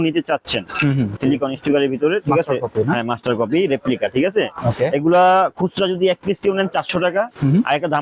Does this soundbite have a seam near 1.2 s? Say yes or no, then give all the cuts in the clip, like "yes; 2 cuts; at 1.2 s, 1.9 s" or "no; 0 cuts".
yes; 1 cut; at 1.2 s